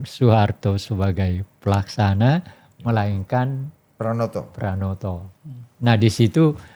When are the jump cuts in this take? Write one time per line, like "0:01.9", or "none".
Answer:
none